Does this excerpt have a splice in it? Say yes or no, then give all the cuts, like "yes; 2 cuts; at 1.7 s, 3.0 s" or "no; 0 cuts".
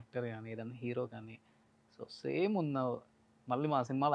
no; 0 cuts